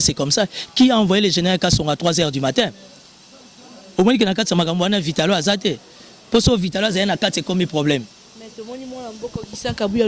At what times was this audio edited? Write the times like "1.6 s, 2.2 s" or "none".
none